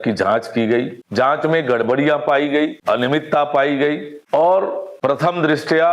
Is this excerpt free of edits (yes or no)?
no